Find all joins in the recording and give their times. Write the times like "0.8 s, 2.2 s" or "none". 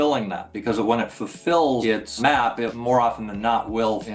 1.9 s